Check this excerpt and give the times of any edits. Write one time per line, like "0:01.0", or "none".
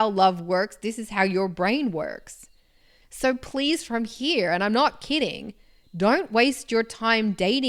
none